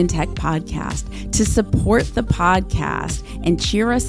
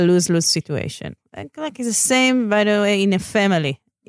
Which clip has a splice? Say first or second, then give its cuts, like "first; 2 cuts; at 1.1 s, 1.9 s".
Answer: second; 1 cut; at 1.1 s